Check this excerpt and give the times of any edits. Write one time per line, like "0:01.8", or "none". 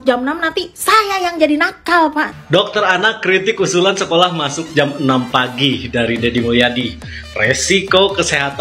0:02.4